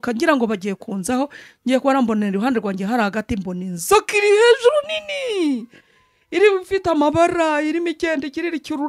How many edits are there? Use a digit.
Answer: 0